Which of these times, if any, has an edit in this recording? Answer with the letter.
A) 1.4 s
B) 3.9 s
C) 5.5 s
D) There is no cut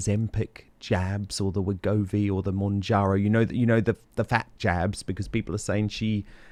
D